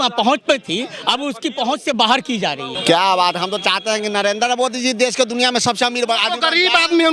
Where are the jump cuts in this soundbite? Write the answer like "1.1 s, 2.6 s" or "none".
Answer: 2.7 s